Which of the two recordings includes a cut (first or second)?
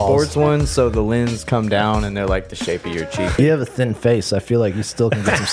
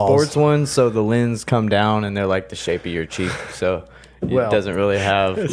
first